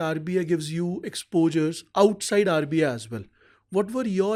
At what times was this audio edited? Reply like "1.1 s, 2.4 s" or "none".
none